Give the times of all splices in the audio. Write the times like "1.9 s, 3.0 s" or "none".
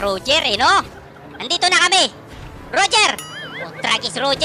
0.9 s